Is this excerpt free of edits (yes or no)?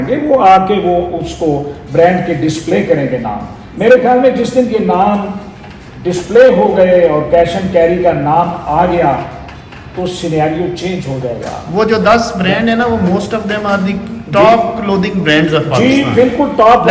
yes